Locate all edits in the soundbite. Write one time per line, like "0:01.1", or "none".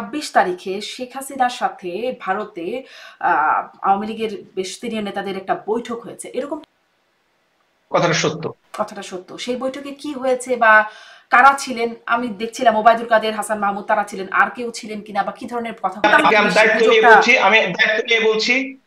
0:06.6
0:16.0